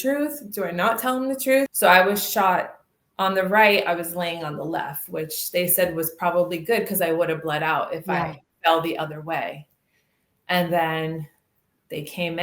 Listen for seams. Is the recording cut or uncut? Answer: cut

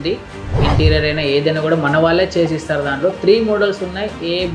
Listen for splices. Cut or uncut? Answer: uncut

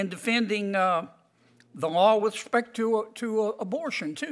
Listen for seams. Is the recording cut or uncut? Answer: uncut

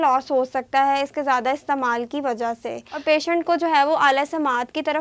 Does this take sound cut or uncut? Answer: cut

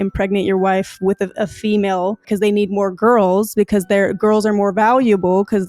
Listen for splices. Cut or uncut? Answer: cut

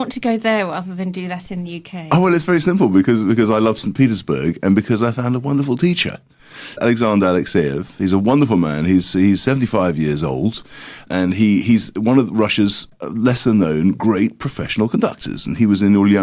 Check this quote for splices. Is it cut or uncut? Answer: uncut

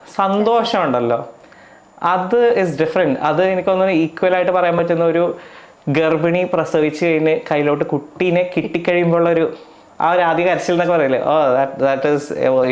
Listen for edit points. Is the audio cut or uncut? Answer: uncut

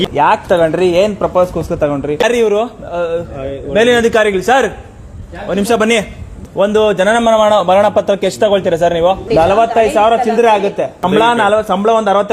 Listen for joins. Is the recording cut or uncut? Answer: cut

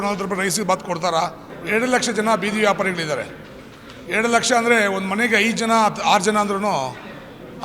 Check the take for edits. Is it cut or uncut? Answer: cut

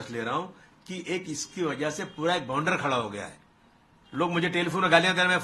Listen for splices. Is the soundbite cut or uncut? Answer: uncut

